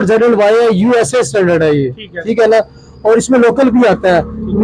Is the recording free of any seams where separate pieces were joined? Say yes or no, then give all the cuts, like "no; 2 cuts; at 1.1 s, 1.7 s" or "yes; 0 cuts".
yes; 0 cuts